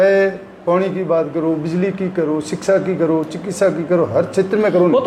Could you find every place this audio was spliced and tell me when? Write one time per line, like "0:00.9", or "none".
none